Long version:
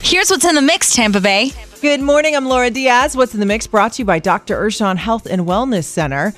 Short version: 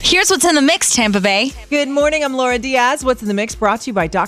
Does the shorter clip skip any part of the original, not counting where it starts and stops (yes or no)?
yes